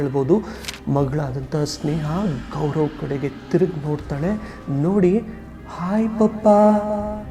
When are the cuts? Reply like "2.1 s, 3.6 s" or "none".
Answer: none